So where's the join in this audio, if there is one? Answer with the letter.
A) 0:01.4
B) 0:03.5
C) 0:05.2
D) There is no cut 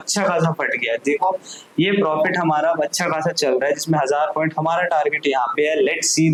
D